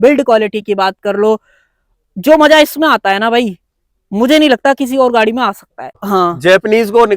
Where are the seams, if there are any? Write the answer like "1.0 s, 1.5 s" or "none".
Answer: 5.9 s